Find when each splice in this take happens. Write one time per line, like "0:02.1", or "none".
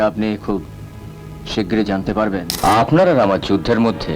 0:02.5